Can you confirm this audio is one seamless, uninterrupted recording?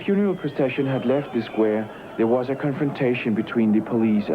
yes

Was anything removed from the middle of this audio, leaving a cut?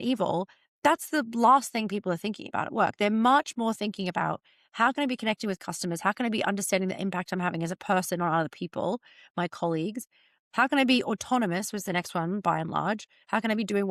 no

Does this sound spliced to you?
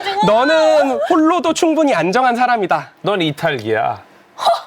yes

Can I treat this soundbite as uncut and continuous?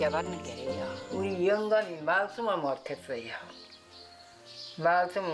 no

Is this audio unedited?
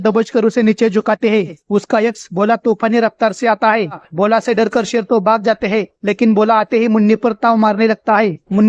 no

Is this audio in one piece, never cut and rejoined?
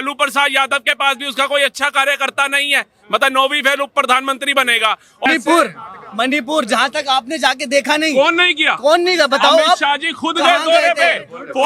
no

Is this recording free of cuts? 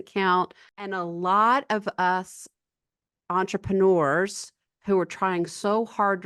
no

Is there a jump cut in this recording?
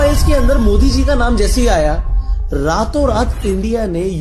no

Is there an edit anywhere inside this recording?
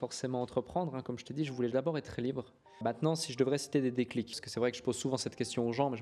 yes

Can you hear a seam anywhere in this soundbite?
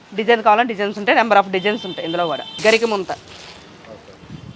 yes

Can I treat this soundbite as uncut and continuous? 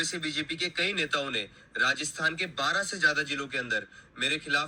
yes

